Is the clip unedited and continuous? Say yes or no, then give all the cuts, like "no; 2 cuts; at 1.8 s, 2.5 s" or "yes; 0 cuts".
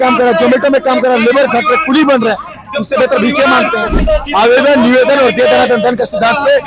no; 1 cut; at 4.0 s